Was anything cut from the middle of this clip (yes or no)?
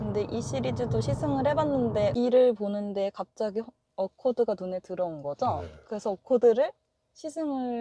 yes